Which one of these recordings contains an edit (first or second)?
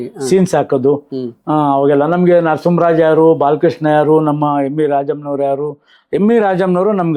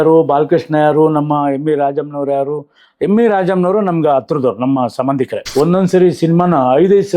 second